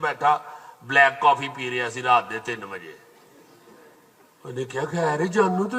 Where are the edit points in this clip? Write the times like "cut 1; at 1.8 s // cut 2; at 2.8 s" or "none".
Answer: none